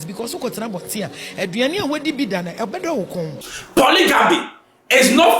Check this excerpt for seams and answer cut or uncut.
cut